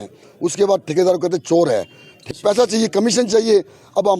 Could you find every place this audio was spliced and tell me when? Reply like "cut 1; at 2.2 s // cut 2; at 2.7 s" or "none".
cut 1; at 2.3 s